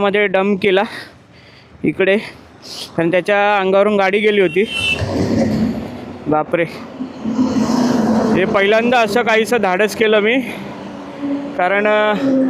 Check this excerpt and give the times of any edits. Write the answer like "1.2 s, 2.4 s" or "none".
none